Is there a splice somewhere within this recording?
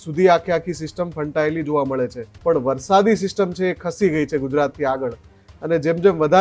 yes; 1 cut; at 2.3 s

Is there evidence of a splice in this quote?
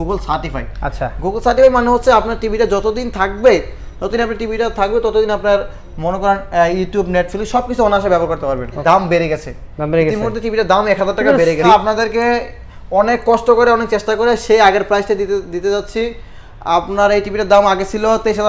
yes; 2 cuts; at 8.8 s, 11.7 s

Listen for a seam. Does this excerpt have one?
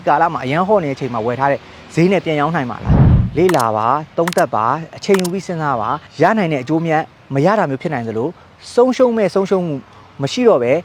yes; 2 cuts; at 3.2 s, 6.0 s

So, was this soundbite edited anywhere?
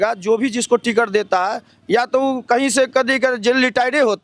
no; 0 cuts

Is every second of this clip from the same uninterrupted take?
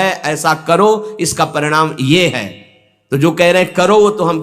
yes; 0 cuts

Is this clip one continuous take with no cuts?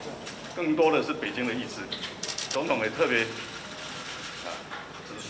no; 1 cut; at 2.4 s

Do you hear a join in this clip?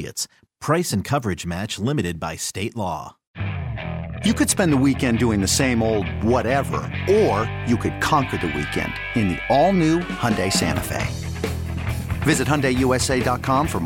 yes; 1 cut; at 3.2 s

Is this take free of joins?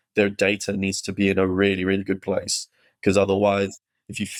yes; 0 cuts

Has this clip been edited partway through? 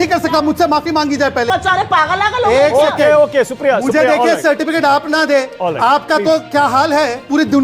yes; 1 cut; at 1.5 s

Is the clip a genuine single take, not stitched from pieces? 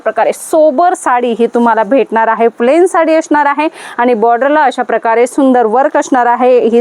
yes; 0 cuts

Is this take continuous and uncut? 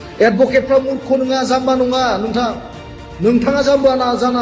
no; 1 cut; at 2.8 s

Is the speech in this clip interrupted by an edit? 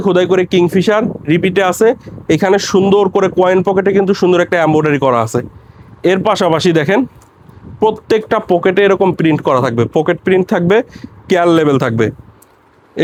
no; 0 cuts

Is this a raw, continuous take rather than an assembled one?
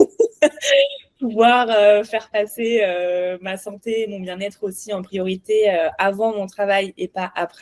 yes; 0 cuts

